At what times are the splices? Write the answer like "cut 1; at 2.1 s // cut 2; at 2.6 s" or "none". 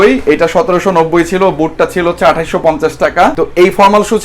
cut 1; at 3.3 s